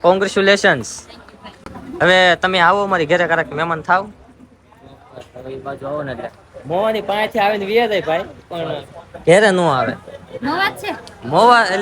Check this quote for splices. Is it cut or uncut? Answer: uncut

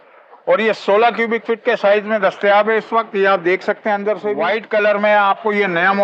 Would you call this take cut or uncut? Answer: cut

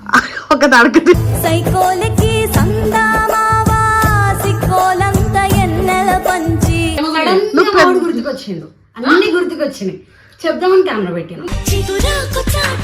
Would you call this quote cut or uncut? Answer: cut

